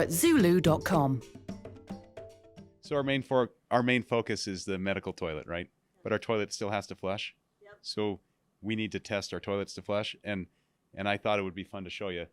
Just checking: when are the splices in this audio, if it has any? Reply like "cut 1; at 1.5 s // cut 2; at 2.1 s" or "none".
cut 1; at 2.7 s